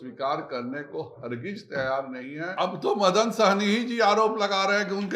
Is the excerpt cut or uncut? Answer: cut